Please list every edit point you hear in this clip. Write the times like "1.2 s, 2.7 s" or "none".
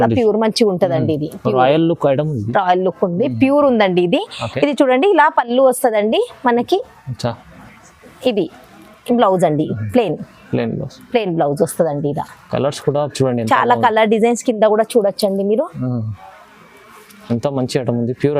none